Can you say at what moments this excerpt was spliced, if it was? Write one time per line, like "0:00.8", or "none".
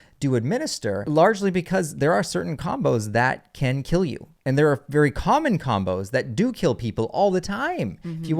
0:01.0
0:04.3